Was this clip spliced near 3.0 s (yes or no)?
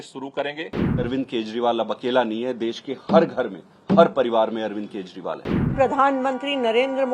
no